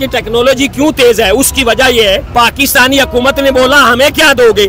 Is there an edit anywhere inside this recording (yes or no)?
yes